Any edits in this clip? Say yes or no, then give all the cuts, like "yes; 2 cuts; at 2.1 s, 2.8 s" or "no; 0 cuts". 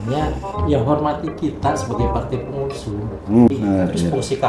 yes; 1 cut; at 3.5 s